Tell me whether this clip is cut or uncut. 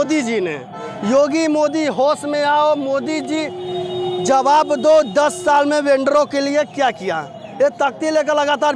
uncut